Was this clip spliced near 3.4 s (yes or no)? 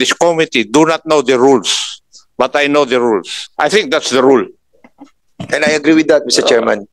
yes